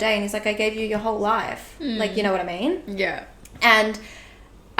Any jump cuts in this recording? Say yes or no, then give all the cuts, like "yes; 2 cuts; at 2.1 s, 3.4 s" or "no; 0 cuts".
no; 0 cuts